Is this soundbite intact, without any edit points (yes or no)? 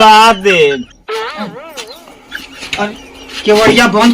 no